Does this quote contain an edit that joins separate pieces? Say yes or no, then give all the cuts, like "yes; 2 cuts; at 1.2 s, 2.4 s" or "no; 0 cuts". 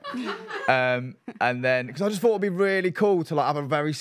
no; 0 cuts